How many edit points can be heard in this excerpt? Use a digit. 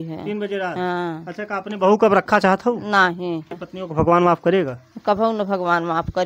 1